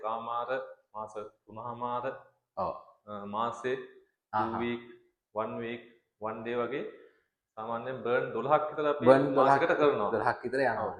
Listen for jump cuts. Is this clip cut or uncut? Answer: uncut